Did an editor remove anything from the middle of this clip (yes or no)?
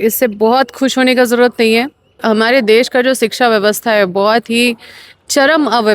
yes